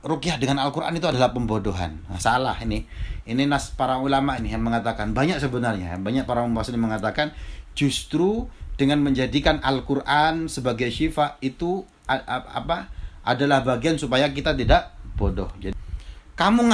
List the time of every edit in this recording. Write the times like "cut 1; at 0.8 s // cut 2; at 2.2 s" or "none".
cut 1; at 15.7 s